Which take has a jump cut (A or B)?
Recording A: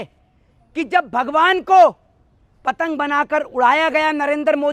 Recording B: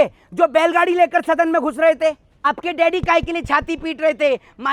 B